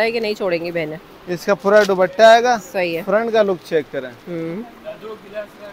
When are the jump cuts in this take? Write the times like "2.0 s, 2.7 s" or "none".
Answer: none